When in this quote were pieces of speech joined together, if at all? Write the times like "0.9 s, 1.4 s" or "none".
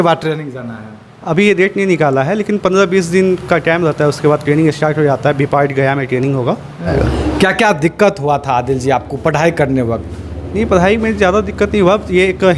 6.9 s